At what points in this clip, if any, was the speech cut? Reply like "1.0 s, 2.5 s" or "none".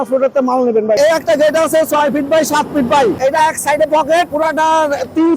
1.0 s, 3.2 s, 4.3 s